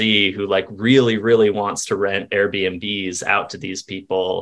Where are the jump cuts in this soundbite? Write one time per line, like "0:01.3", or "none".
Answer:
none